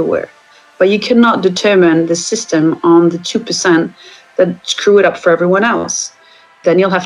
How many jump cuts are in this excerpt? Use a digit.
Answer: 0